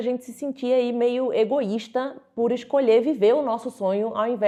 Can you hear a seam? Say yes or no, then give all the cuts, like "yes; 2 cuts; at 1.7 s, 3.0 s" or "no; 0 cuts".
no; 0 cuts